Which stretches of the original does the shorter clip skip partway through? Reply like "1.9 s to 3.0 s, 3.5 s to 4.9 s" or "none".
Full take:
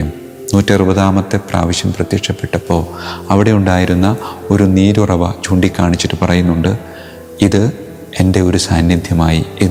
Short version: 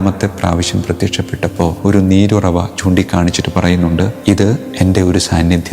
2.9 s to 4.4 s, 7.2 s to 7.9 s